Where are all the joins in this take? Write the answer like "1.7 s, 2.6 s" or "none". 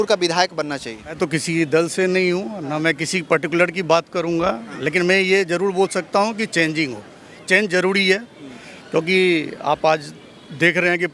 1.2 s